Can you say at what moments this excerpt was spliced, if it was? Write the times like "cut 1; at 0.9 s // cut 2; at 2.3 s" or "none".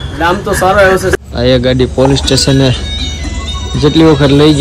cut 1; at 1.1 s